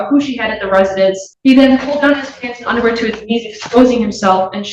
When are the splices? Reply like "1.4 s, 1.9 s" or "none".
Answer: 1.3 s